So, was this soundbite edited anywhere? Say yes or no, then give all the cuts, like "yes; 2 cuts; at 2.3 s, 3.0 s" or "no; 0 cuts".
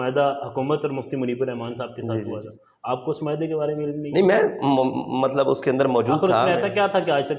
no; 0 cuts